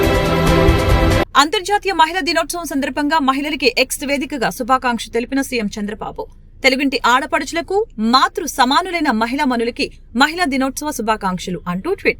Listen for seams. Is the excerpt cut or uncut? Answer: cut